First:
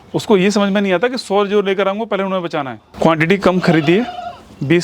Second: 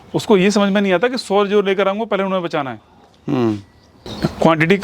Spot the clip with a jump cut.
first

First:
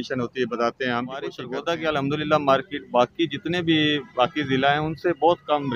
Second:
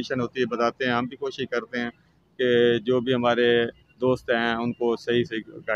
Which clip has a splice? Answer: first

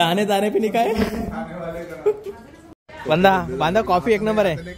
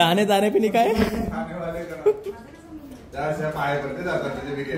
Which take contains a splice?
first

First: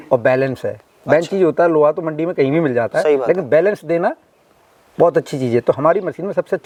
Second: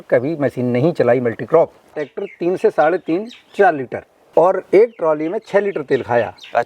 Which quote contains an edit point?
second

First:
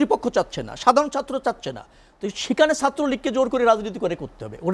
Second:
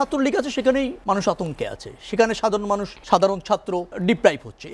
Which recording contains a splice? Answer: second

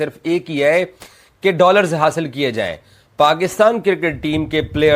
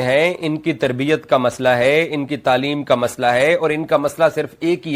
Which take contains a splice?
first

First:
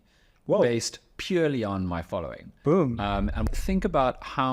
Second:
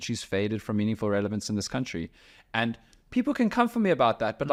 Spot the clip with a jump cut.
first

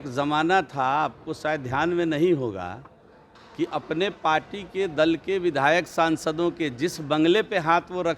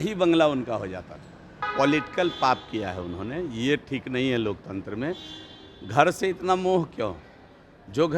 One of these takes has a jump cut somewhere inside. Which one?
second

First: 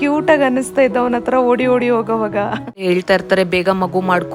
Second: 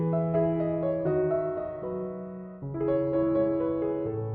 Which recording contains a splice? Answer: first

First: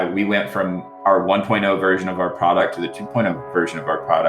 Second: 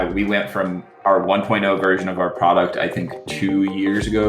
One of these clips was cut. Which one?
first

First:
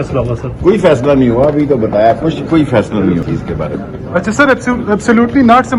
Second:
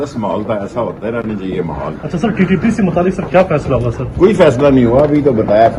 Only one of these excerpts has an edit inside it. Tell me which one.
first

